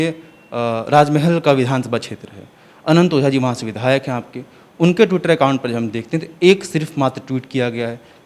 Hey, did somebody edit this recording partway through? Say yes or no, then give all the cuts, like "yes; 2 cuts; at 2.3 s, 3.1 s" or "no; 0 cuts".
no; 0 cuts